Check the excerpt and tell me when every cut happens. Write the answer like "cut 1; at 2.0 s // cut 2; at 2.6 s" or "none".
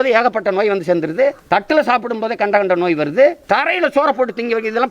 cut 1; at 1.4 s // cut 2; at 3.4 s